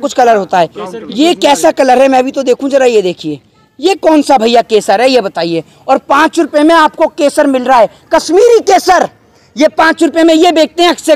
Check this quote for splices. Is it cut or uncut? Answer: uncut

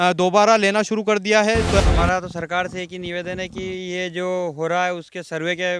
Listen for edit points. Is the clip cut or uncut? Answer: cut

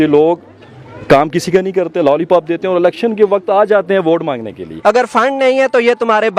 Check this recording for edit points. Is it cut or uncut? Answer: cut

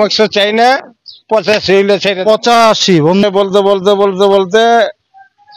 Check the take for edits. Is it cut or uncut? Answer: cut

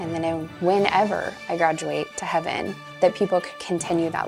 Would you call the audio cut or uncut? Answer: cut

